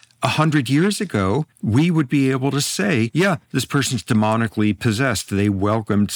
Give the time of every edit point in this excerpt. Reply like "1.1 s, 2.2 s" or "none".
1.5 s, 3.1 s